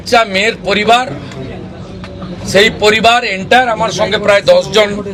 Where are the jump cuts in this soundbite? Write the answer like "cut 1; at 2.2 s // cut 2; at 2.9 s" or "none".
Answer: none